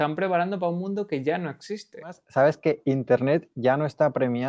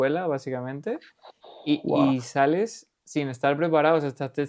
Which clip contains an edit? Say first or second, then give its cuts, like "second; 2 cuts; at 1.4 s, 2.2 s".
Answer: first; 1 cut; at 2.2 s